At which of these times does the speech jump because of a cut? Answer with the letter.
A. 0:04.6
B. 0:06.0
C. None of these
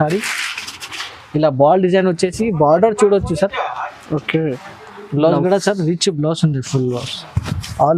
A